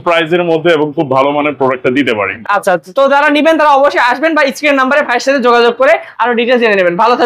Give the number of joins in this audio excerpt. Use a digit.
0